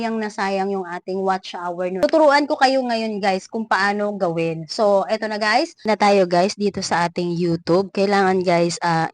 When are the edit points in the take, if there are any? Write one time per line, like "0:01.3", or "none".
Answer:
0:02.0
0:05.9